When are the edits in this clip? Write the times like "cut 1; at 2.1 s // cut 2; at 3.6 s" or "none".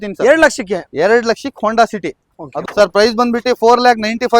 cut 1; at 2.5 s